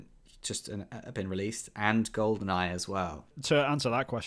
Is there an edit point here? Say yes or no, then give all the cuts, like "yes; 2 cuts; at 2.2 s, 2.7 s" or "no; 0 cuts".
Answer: yes; 1 cut; at 3.4 s